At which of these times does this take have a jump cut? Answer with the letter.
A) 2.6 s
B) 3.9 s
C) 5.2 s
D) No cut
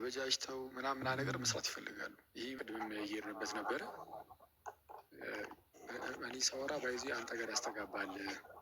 A